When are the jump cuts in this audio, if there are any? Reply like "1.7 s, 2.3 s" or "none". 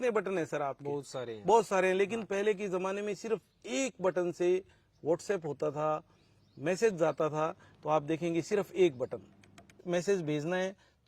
9.8 s